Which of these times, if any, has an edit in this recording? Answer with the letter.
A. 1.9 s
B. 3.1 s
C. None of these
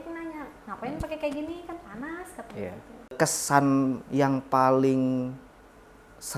B